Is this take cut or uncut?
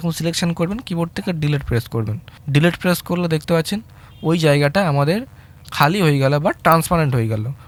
uncut